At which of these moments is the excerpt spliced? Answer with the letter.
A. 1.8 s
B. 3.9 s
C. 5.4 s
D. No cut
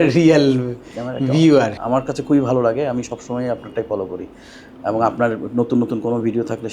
A